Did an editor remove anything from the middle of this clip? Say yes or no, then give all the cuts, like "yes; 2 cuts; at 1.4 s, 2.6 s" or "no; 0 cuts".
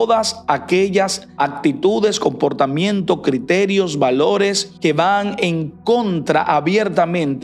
yes; 2 cuts; at 1.2 s, 4.7 s